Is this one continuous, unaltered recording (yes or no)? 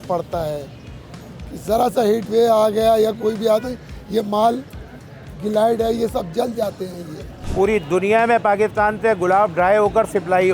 no